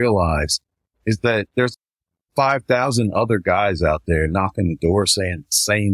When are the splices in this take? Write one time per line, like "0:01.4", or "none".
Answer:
0:01.5